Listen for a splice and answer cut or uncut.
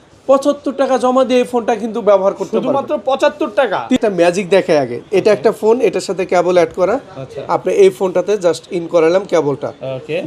cut